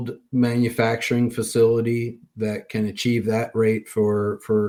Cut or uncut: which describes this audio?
uncut